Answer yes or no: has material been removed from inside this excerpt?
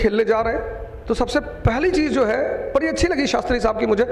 no